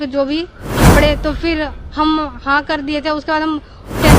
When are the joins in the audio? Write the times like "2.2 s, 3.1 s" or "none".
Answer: 0.9 s